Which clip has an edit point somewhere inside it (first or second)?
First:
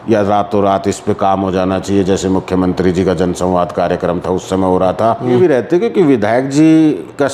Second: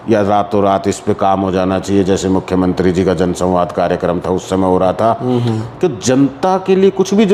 first